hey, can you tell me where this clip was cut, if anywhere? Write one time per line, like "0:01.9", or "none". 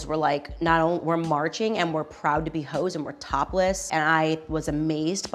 0:03.8